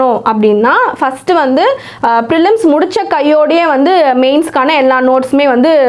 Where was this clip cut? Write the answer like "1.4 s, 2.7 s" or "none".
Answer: none